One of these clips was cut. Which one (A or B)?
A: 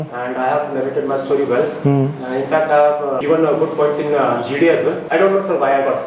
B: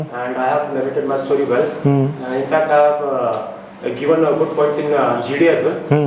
A